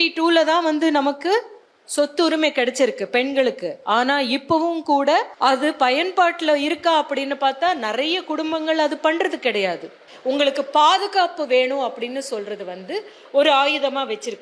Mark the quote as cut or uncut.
cut